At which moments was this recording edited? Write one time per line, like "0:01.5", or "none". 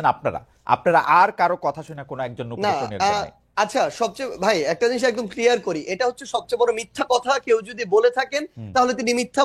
none